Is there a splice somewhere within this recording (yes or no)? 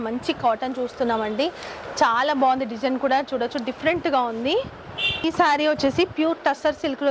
yes